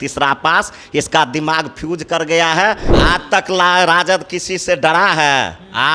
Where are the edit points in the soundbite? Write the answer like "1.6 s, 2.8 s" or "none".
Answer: 2.9 s